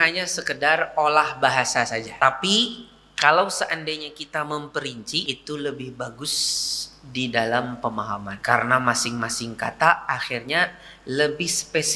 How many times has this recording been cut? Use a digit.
3